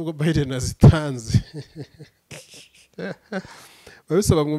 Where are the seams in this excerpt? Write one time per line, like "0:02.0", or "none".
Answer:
none